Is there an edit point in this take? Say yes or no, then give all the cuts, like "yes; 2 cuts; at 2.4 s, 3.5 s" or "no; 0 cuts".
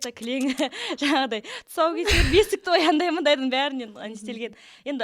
no; 0 cuts